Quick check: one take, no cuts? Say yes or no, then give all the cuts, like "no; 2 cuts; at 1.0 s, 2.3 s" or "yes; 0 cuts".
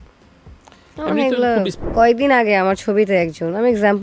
no; 1 cut; at 1.8 s